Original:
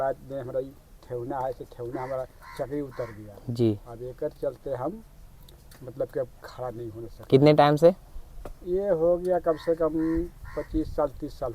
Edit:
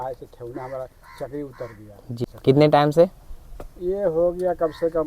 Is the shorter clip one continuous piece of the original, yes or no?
no